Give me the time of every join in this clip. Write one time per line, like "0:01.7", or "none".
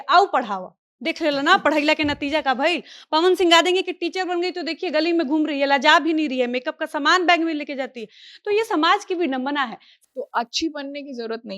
0:09.9